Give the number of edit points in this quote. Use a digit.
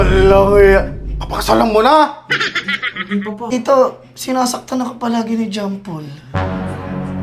1